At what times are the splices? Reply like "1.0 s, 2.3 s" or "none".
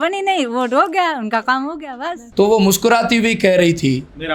2.2 s